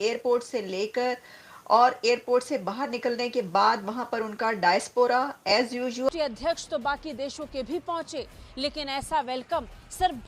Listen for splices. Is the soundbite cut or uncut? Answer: cut